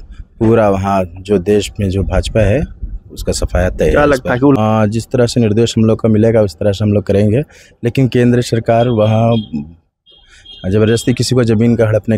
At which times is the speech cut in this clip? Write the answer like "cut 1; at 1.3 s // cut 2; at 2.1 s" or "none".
cut 1; at 4.6 s